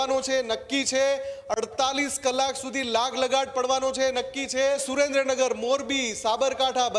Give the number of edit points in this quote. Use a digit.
1